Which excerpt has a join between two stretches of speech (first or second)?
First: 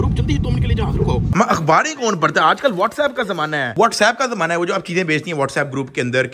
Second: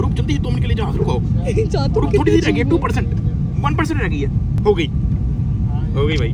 first